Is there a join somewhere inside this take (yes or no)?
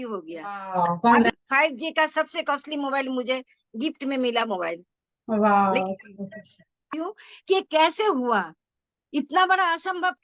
yes